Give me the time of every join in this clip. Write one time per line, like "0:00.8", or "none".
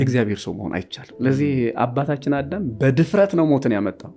0:01.0